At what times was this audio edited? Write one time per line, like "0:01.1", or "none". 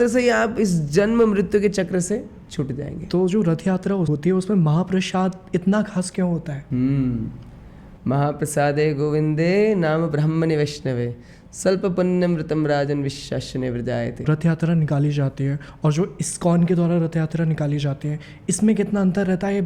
0:02.9
0:14.2